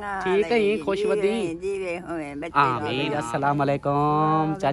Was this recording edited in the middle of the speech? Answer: yes; 1 cut; at 3.1 s

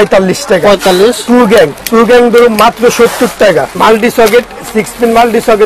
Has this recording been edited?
yes; 2 cuts; at 1.8 s, 3.8 s

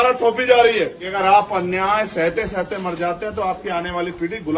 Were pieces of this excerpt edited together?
yes; 1 cut; at 1.0 s

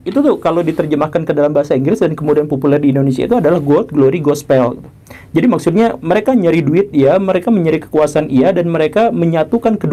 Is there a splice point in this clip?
no; 0 cuts

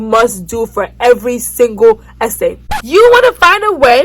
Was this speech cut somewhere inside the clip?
yes; 1 cut; at 2.6 s

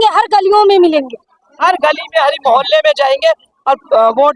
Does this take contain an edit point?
no; 0 cuts

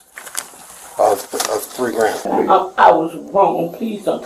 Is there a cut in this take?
yes; 1 cut; at 2.2 s

